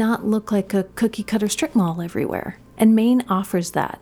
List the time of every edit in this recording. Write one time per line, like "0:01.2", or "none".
0:02.6